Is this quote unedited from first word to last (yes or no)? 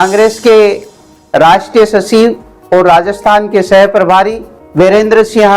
yes